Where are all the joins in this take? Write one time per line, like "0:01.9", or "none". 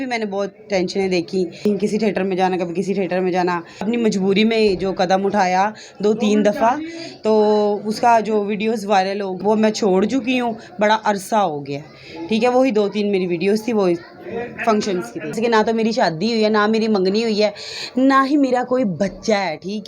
0:01.7
0:03.9
0:09.4
0:15.4

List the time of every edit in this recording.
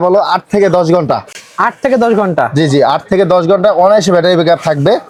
none

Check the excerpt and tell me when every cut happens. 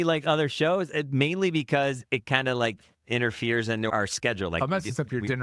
none

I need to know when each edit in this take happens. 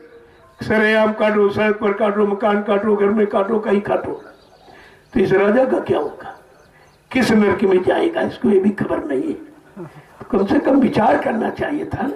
none

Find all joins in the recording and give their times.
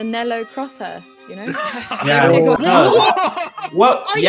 0:02.6

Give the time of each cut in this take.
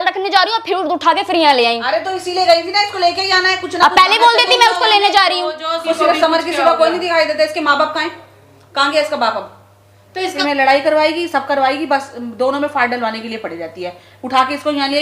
0:05.8
0:10.4

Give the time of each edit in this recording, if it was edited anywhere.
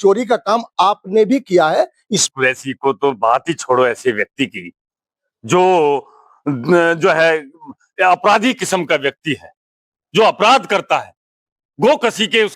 0:02.2

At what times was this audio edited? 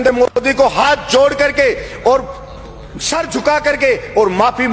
none

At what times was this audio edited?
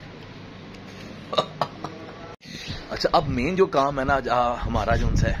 0:02.2

